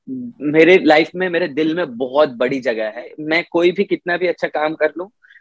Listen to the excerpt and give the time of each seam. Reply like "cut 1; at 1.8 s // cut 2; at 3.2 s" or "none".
cut 1; at 3.2 s